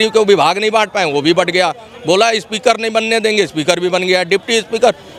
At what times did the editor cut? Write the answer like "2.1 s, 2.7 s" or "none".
none

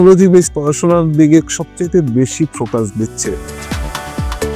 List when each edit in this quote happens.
3.5 s

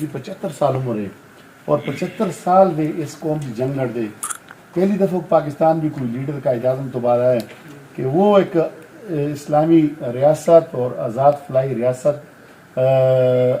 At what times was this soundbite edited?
none

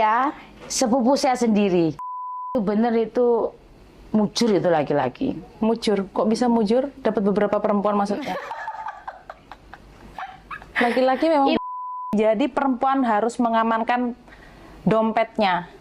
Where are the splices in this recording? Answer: 2.1 s, 11.7 s

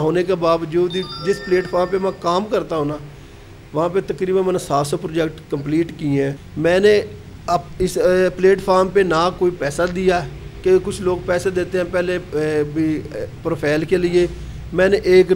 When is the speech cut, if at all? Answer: 6.4 s

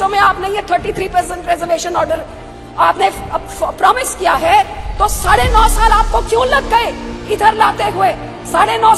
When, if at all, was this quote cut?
none

